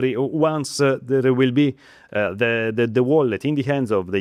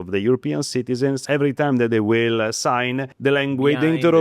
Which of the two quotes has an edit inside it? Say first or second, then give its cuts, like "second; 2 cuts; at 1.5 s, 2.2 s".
second; 2 cuts; at 1.2 s, 3.1 s